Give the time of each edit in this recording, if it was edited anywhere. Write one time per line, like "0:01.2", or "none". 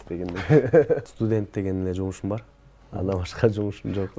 0:01.1